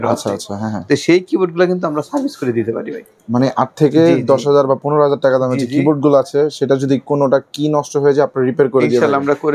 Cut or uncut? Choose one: uncut